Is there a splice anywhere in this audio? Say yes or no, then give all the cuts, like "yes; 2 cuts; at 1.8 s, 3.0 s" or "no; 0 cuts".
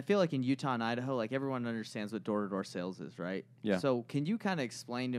no; 0 cuts